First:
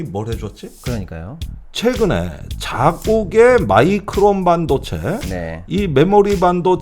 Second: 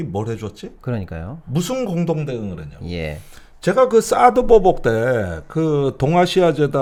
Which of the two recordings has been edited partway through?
first; 1 cut; at 1.4 s

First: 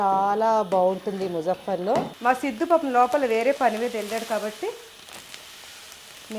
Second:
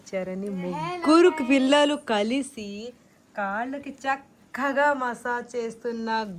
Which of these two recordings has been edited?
first; 1 cut; at 2.1 s

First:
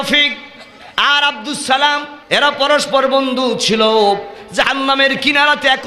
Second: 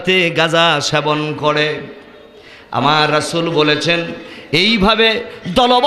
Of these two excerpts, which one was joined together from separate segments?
first; 1 cut; at 2.1 s

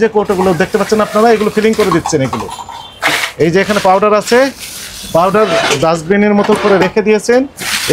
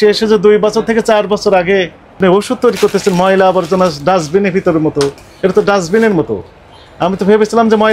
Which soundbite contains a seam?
second; 1 cut; at 2.2 s

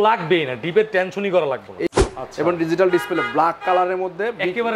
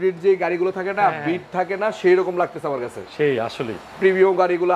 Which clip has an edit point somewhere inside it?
first; 1 cut; at 1.9 s

